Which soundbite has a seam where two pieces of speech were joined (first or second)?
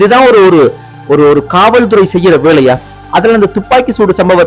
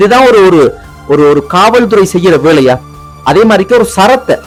first